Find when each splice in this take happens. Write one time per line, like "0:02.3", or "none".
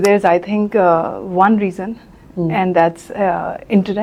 none